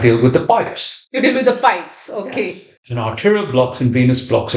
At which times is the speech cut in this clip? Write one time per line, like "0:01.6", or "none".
0:02.8